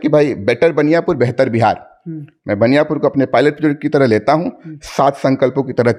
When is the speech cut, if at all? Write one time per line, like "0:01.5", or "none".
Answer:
none